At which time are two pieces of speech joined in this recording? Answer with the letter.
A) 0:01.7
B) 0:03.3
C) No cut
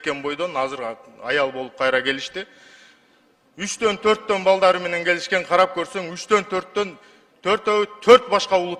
C